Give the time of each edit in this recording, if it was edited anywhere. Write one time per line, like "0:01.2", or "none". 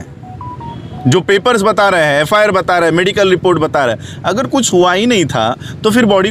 none